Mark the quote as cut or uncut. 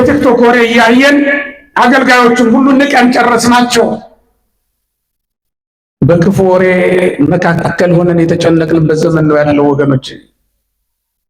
uncut